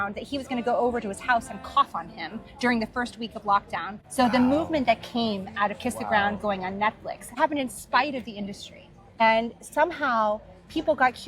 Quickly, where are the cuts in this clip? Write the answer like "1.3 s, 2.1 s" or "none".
4.0 s, 7.4 s, 9.2 s